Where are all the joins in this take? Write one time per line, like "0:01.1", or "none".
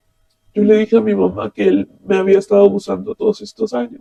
none